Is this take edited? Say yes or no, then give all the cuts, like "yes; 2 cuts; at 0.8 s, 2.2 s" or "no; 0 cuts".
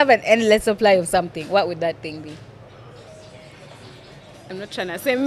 yes; 1 cut; at 3.1 s